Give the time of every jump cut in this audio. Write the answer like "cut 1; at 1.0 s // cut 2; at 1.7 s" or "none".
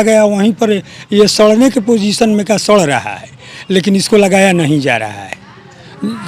none